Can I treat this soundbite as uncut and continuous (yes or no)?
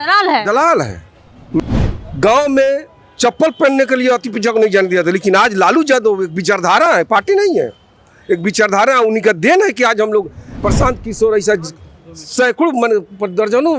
no